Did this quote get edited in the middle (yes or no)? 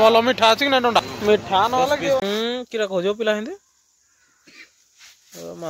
yes